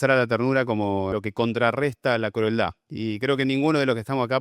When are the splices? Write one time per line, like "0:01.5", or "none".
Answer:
0:01.1